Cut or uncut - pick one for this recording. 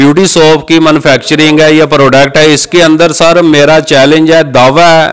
uncut